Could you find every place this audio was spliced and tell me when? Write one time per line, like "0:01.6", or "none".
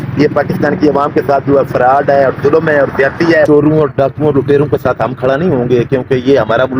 0:03.5